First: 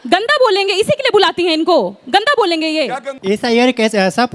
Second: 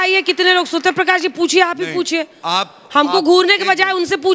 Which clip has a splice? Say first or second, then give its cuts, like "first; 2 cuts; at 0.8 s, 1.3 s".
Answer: first; 1 cut; at 3.2 s